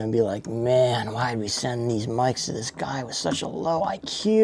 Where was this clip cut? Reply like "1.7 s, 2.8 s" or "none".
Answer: none